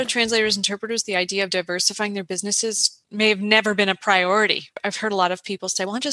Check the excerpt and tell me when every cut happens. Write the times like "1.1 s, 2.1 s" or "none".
4.8 s